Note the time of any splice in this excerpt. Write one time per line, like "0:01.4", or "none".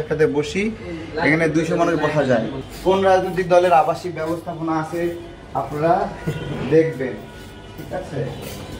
0:02.6